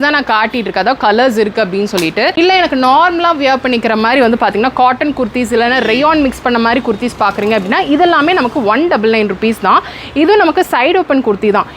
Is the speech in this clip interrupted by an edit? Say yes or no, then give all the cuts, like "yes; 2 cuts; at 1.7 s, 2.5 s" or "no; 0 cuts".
yes; 1 cut; at 2.3 s